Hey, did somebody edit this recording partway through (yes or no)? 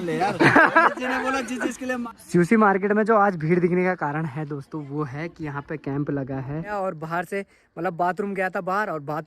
yes